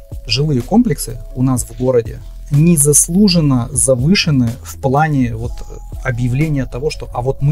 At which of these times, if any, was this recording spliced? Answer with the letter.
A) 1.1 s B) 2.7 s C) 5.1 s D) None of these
D